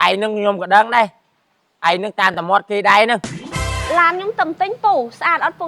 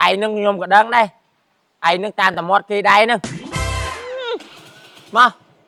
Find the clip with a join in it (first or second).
first